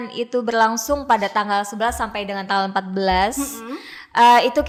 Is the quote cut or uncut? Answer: uncut